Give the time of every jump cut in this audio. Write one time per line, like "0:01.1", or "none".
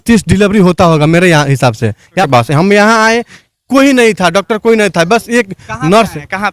0:02.3